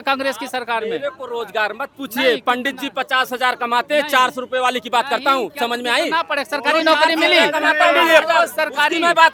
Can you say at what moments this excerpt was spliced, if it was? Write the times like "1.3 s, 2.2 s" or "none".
none